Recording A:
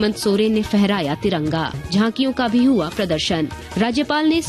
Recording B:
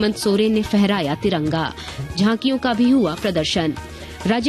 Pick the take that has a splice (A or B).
A